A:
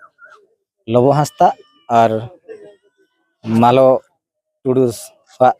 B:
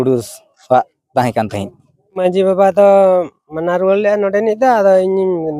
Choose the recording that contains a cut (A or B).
B